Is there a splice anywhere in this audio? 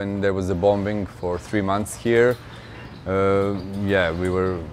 no; 0 cuts

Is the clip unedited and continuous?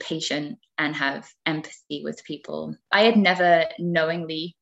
no; 1 cut; at 2.9 s

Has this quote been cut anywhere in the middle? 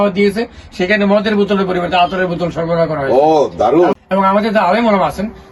yes; 1 cut; at 4.0 s

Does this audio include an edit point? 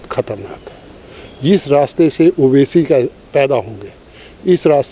no; 0 cuts

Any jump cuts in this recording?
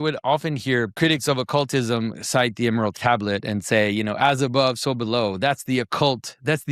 yes; 2 cuts; at 1.0 s, 2.9 s

